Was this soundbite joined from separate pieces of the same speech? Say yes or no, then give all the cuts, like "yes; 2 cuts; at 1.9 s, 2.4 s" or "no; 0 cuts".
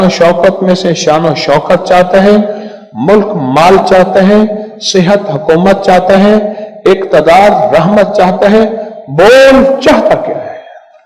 no; 0 cuts